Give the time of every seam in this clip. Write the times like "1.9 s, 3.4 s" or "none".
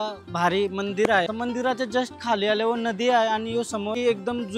none